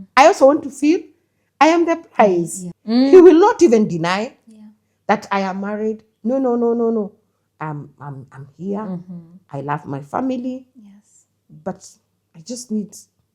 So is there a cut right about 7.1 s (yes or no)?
no